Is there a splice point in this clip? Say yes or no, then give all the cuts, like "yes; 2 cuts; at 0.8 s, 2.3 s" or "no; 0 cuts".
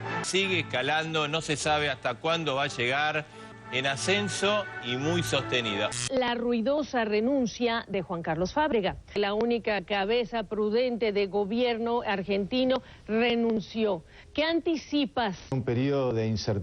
yes; 1 cut; at 6.0 s